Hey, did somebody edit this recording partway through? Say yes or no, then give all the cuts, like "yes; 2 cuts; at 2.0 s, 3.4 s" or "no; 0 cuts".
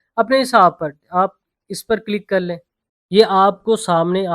yes; 1 cut; at 2.8 s